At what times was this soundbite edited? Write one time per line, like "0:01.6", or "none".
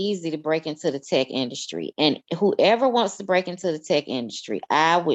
none